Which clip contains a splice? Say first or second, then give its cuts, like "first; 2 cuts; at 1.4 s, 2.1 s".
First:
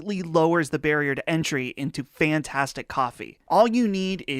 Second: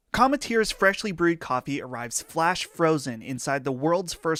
first; 1 cut; at 3.3 s